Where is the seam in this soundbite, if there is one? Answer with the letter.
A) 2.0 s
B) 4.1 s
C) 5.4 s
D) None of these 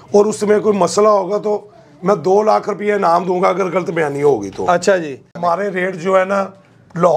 C